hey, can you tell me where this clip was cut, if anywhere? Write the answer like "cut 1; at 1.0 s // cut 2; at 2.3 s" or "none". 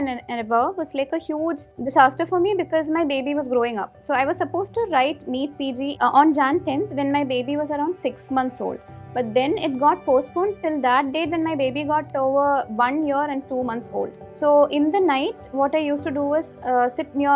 cut 1; at 1.8 s // cut 2; at 6.0 s // cut 3; at 12.1 s // cut 4; at 14.2 s

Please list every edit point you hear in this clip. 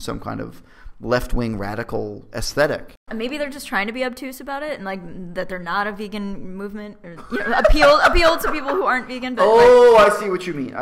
cut 1; at 3.0 s

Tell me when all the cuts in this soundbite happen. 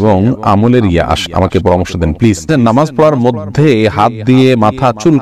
cut 1; at 1.2 s // cut 2; at 2.5 s

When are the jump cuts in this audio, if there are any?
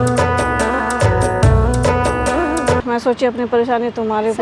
cut 1; at 2.8 s

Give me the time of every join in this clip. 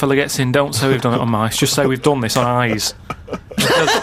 none

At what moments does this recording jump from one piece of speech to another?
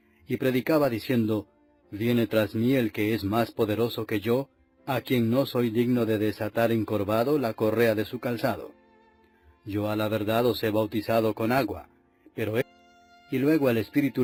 none

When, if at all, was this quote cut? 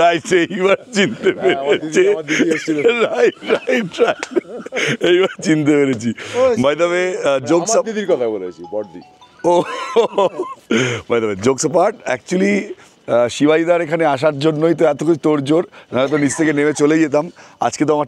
none

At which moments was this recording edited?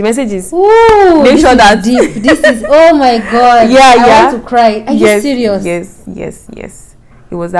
none

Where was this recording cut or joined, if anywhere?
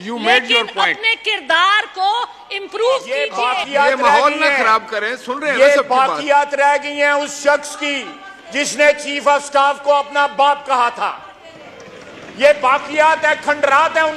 cut 1; at 3.3 s

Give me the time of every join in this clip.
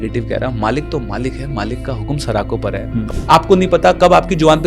cut 1; at 3.0 s

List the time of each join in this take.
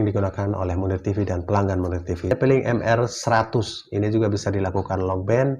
cut 1; at 2.3 s

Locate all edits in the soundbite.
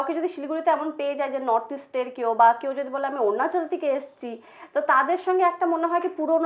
none

